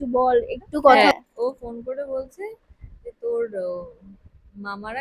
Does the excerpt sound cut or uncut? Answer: cut